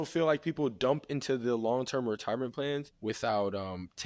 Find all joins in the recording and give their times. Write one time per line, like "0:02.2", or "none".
0:02.9